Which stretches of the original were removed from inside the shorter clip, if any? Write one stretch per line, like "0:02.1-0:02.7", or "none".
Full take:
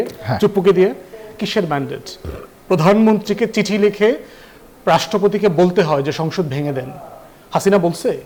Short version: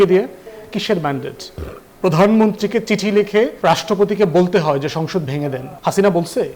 0:04.2-0:04.8
0:06.9-0:07.4